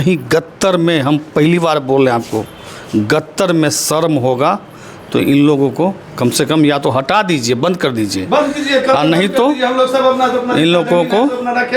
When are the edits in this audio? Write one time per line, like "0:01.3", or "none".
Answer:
none